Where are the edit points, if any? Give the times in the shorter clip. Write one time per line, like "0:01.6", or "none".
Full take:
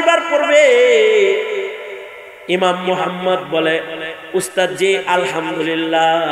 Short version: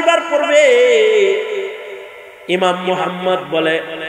none